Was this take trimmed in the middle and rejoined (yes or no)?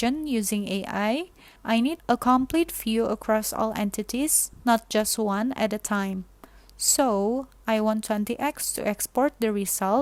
no